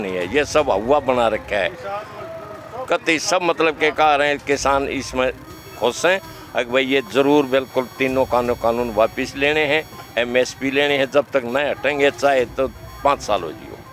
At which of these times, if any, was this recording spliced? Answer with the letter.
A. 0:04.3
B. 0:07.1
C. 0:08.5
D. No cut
D